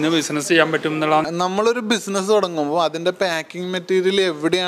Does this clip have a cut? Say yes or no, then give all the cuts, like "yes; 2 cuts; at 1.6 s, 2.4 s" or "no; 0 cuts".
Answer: yes; 1 cut; at 1.3 s